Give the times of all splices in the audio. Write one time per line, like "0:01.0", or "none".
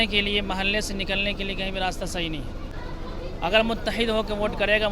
0:02.7